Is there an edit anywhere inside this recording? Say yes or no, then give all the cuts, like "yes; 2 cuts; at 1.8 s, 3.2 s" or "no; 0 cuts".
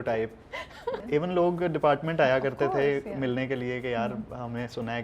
yes; 1 cut; at 1.0 s